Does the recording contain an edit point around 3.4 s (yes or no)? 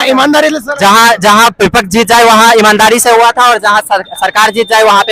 no